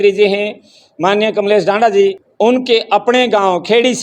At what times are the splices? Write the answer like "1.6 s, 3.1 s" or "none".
2.2 s